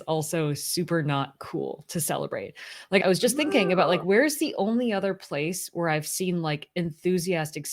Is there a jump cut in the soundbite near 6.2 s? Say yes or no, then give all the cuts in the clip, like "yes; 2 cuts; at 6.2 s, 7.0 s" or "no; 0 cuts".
no; 0 cuts